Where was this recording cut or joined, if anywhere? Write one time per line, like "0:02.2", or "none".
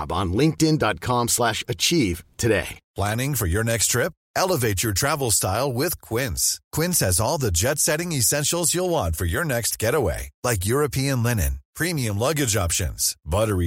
0:02.8